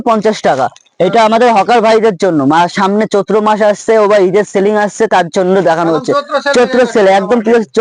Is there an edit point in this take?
no; 0 cuts

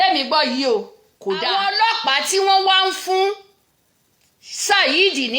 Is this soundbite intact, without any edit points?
no; 1 cut; at 1.5 s

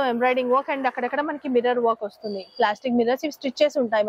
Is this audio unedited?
yes; 0 cuts

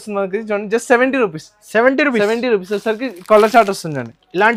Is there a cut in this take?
no; 0 cuts

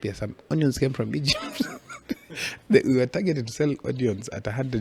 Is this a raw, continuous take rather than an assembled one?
yes; 0 cuts

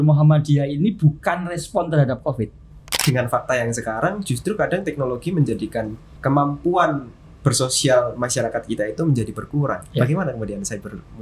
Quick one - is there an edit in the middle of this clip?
yes; 2 cuts; at 3.0 s, 6.1 s

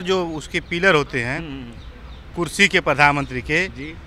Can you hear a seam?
no; 0 cuts

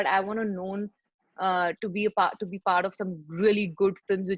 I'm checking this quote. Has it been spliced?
no; 0 cuts

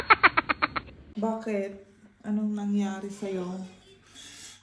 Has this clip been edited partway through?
yes; 1 cut; at 1.0 s

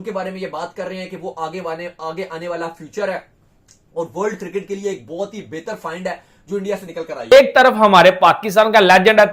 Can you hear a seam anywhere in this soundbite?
yes; 1 cut; at 7.2 s

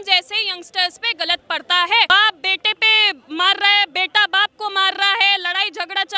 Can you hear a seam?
yes; 1 cut; at 2.1 s

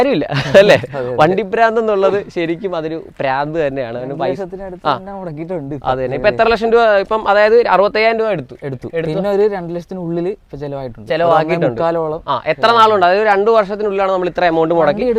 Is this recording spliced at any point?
no; 0 cuts

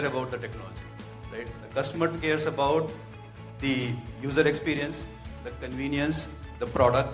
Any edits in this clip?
no; 0 cuts

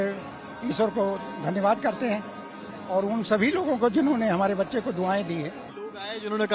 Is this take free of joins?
yes; 0 cuts

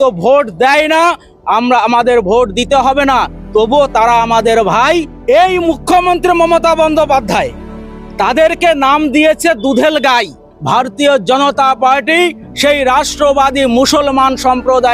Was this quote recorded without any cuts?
no; 2 cuts; at 5.1 s, 10.5 s

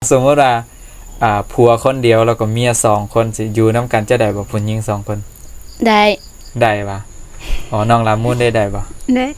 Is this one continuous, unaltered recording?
yes; 0 cuts

